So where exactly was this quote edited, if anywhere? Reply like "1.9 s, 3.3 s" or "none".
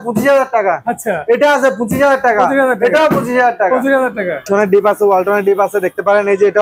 4.5 s